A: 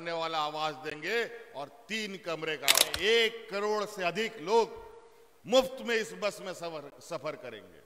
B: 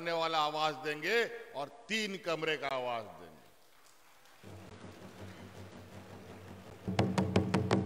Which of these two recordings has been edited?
A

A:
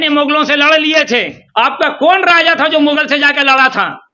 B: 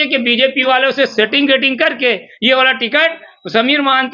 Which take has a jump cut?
A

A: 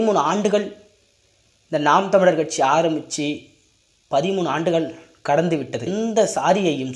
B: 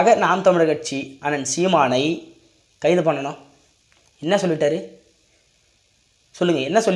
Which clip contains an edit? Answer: A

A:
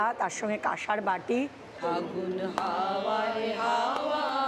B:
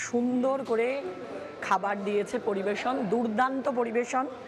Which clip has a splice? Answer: A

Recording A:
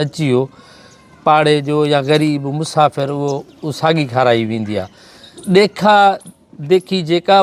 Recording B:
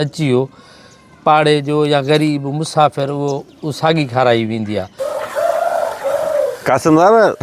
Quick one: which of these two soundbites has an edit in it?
B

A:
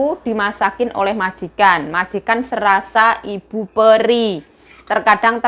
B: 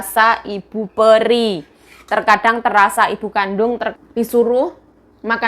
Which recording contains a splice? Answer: B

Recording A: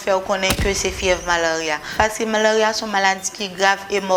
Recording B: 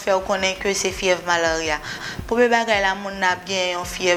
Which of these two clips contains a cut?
A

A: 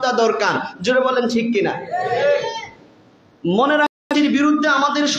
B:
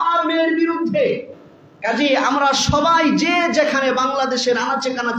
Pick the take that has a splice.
A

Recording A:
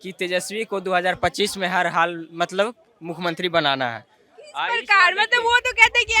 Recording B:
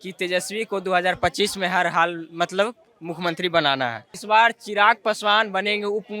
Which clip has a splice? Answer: B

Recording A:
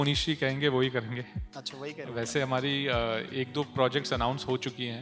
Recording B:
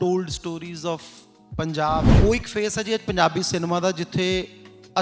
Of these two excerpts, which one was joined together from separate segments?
B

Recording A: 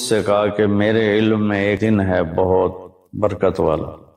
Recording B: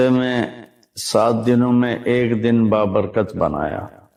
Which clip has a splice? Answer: A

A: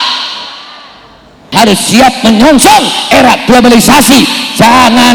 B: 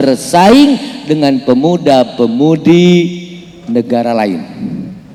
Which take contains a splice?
A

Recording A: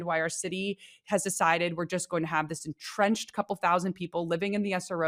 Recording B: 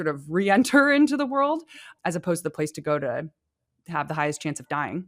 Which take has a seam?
B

